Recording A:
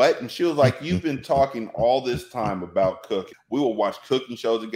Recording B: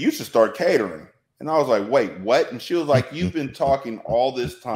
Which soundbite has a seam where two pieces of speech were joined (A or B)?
A